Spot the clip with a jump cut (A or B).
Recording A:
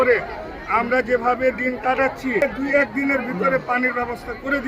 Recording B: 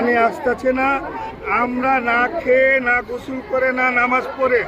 A